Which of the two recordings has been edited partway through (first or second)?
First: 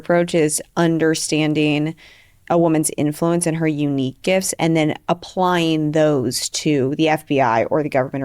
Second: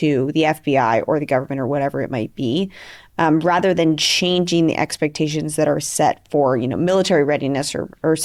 first